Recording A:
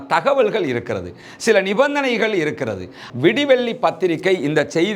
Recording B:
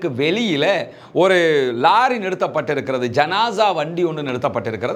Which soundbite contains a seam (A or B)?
A